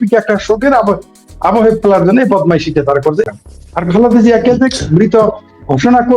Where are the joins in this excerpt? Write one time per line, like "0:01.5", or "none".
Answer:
0:03.4